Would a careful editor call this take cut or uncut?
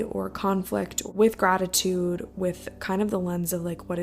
cut